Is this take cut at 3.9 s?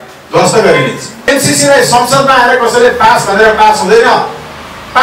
no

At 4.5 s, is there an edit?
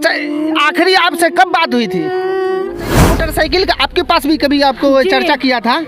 no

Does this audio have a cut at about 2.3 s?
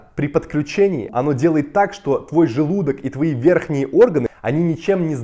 no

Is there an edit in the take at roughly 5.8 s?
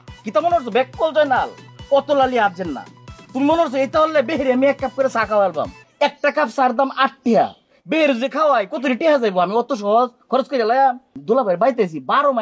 yes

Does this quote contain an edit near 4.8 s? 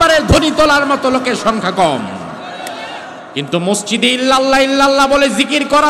no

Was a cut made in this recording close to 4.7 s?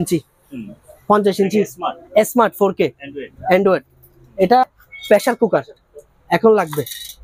yes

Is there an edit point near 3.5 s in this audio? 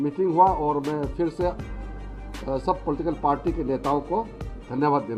no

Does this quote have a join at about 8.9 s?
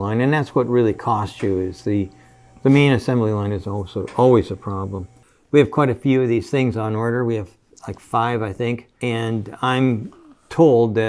yes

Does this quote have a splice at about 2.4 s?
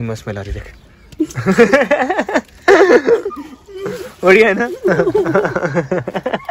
no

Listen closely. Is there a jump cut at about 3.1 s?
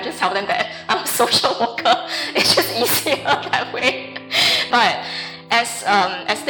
no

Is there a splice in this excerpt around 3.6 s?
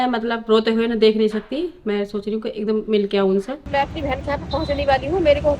yes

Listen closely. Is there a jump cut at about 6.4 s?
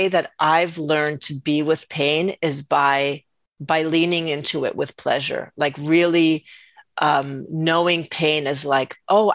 no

